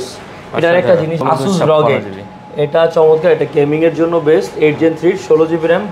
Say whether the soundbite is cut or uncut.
cut